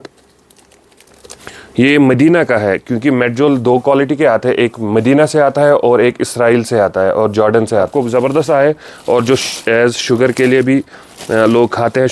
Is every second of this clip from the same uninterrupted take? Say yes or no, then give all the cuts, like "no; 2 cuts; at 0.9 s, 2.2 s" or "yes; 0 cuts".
no; 1 cut; at 7.9 s